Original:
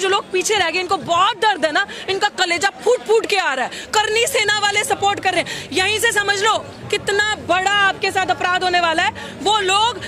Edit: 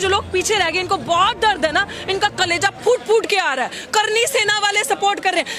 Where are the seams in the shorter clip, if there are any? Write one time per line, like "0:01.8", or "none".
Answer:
none